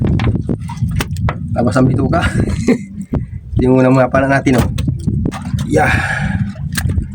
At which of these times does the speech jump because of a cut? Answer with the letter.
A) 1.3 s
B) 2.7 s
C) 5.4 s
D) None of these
C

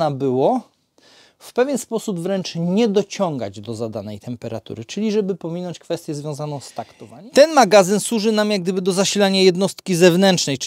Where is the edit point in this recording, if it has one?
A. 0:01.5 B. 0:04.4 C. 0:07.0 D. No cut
C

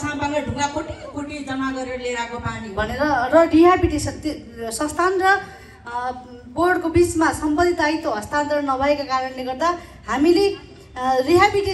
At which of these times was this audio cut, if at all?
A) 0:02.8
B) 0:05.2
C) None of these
A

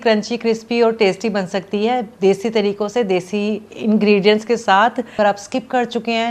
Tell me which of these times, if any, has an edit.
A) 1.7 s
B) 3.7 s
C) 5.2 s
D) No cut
C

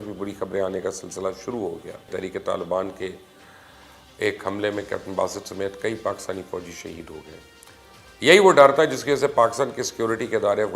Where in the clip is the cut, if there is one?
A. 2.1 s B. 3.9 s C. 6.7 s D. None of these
A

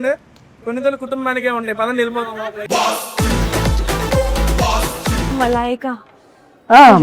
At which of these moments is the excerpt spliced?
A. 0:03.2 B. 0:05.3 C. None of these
C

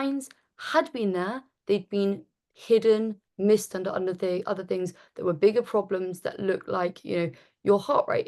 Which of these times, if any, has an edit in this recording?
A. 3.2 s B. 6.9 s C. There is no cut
A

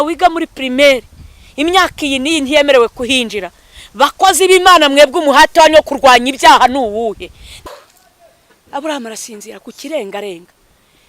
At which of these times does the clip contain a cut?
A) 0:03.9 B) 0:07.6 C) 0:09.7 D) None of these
B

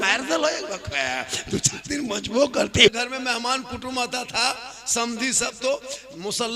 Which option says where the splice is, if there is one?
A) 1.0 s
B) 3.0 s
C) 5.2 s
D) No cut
B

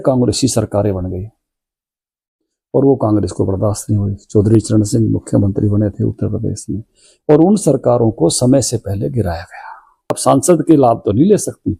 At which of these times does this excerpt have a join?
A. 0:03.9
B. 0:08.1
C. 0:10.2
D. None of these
C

